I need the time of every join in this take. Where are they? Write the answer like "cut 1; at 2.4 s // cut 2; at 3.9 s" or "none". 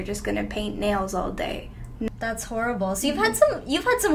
cut 1; at 2.1 s